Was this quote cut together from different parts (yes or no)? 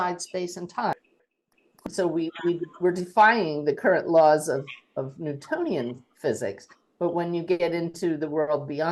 no